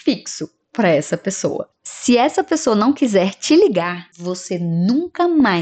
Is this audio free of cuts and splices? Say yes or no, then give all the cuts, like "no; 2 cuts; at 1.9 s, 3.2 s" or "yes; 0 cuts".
yes; 0 cuts